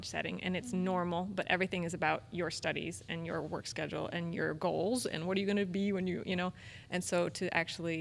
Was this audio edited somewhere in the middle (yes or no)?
no